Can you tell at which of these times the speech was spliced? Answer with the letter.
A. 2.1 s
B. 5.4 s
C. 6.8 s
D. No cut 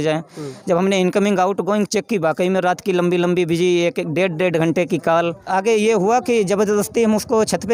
B